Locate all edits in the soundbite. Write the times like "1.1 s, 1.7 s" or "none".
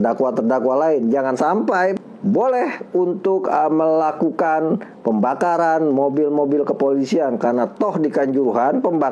1.9 s